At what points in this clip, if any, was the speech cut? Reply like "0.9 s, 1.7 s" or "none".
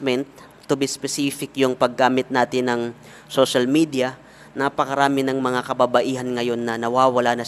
none